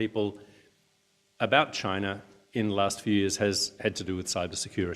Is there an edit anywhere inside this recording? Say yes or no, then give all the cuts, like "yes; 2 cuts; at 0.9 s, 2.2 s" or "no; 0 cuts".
yes; 1 cut; at 3.4 s